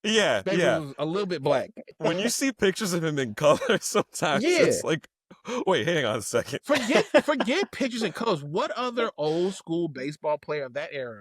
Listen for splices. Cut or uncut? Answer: cut